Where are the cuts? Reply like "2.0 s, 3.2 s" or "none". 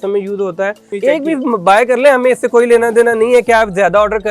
0.9 s